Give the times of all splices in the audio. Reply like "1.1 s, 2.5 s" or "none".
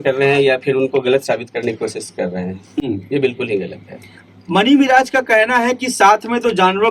none

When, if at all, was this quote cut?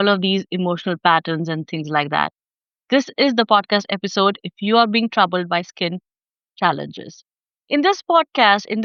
none

